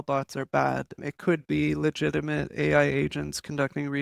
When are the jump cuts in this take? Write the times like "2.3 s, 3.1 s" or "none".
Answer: 1.0 s